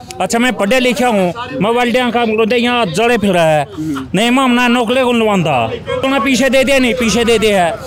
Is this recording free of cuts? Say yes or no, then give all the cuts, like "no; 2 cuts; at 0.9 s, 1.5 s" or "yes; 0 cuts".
no; 1 cut; at 6.0 s